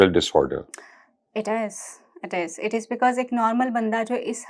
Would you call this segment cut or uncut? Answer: uncut